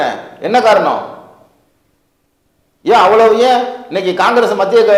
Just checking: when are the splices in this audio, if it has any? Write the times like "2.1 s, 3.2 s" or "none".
none